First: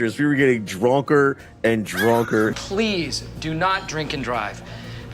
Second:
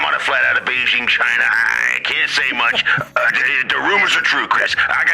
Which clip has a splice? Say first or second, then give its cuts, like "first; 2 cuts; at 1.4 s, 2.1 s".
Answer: first; 1 cut; at 2.5 s